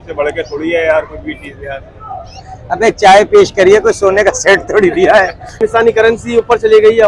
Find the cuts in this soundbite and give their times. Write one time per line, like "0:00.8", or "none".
0:05.6